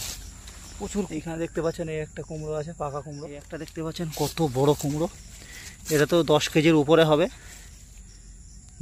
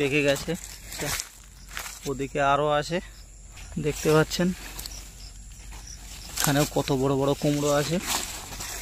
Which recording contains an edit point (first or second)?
first